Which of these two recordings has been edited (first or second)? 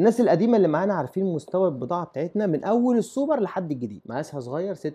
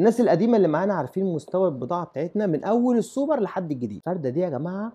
first